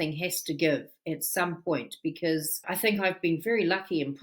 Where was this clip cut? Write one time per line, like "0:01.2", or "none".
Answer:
0:02.6

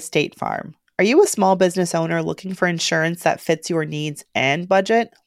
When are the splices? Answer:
none

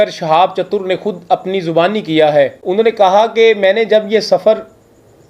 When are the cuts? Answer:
0:02.6

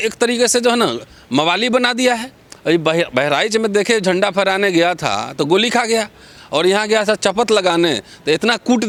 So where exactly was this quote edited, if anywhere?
none

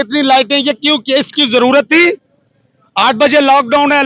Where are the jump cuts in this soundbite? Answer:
none

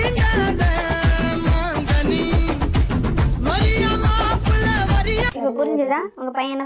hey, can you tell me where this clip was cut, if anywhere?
0:05.3

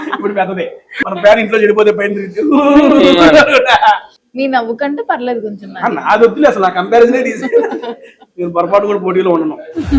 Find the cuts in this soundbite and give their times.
0:01.0
0:04.1

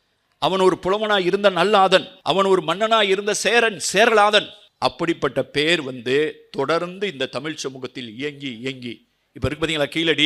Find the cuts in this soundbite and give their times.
0:02.2
0:04.6

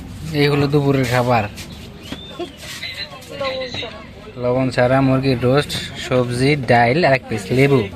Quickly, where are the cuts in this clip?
none

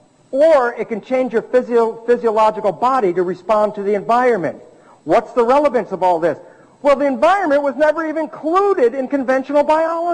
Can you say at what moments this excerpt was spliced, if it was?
none

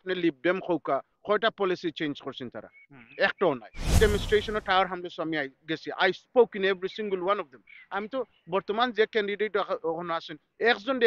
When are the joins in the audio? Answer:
0:03.8

